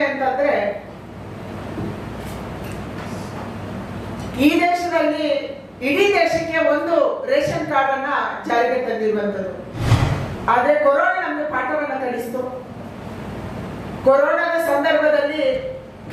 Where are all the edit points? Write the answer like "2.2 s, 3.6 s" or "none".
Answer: 9.8 s